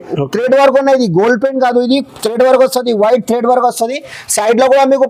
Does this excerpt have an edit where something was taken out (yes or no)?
no